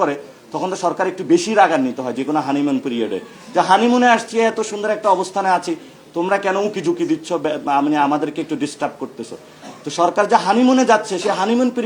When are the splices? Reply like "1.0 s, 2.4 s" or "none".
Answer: none